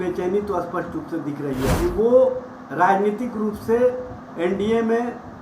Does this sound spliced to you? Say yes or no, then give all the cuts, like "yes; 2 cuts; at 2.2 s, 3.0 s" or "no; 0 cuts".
yes; 1 cut; at 1.7 s